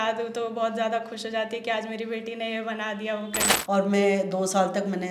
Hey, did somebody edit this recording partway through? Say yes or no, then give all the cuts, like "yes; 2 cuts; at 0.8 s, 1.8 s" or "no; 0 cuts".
yes; 1 cut; at 3.5 s